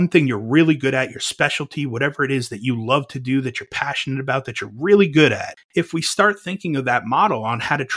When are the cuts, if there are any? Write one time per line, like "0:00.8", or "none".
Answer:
0:05.5